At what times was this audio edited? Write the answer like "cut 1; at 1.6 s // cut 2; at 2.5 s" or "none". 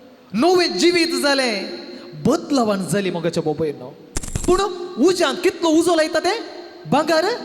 cut 1; at 4.3 s